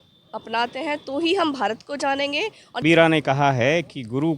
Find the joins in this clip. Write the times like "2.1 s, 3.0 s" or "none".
2.8 s

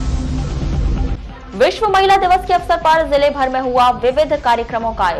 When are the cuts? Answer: 1.0 s

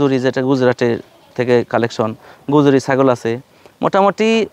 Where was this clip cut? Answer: none

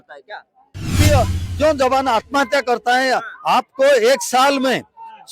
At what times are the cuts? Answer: 1.0 s

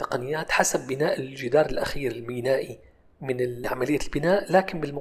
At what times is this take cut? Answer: 3.6 s

